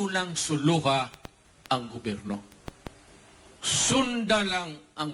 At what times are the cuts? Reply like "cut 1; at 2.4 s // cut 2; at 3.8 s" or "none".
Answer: none